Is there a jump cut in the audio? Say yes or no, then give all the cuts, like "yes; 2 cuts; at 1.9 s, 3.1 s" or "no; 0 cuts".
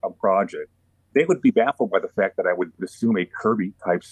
yes; 1 cut; at 0.9 s